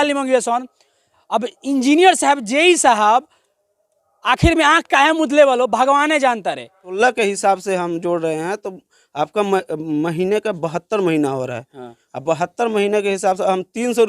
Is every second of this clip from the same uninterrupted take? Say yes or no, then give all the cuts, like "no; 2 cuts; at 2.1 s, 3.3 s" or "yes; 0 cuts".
no; 1 cut; at 6.9 s